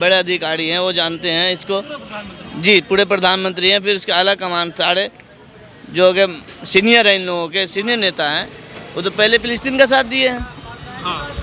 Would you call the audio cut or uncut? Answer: uncut